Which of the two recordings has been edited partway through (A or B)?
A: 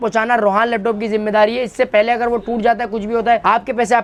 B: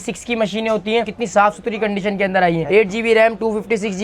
B